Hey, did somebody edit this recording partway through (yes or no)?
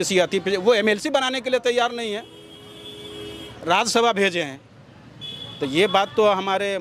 no